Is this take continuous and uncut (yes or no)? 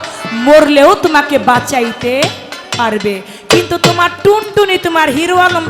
yes